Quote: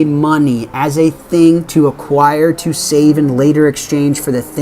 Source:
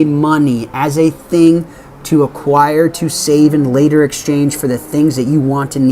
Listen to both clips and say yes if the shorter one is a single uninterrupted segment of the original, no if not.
no